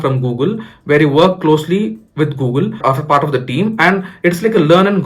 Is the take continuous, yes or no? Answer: no